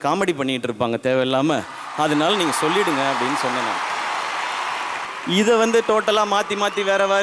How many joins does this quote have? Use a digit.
1